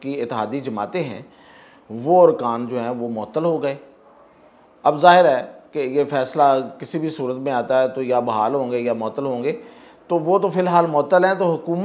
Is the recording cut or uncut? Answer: uncut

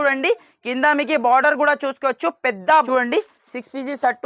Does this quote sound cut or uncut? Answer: cut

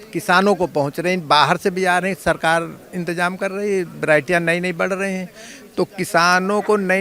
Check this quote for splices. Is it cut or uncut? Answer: uncut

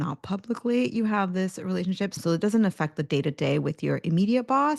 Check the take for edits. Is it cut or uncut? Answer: cut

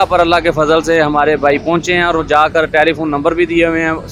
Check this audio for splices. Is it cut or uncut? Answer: uncut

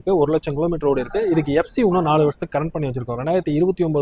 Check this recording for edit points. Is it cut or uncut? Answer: uncut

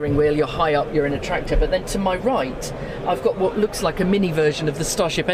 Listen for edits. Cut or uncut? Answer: uncut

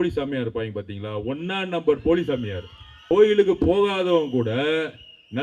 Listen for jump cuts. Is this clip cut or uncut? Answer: cut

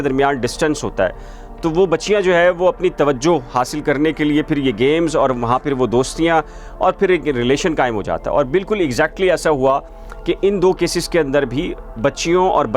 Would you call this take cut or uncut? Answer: uncut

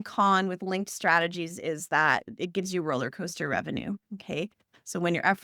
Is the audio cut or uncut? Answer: uncut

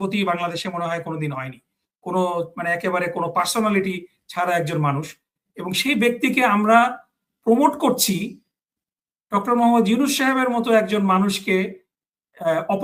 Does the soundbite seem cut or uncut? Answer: uncut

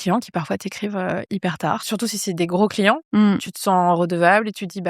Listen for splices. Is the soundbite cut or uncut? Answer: cut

